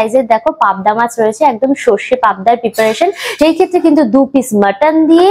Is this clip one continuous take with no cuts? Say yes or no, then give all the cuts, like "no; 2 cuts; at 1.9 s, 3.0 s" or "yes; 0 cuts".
yes; 0 cuts